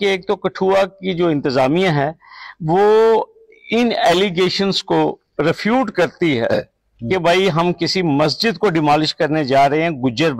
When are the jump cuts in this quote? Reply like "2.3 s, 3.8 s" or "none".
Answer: none